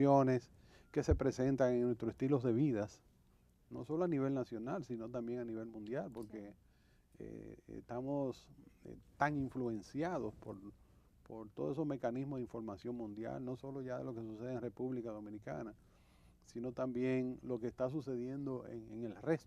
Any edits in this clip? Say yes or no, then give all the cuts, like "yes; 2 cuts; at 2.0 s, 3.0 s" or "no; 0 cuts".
yes; 1 cut; at 17.2 s